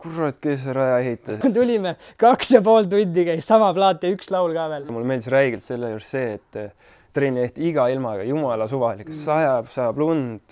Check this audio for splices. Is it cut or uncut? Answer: cut